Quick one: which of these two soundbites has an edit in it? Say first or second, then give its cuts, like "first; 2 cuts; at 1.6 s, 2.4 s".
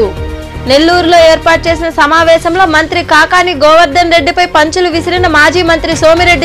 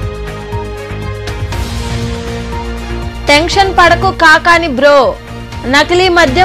second; 1 cut; at 1.4 s